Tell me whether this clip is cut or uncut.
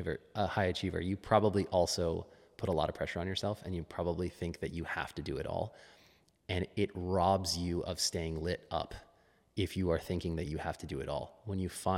uncut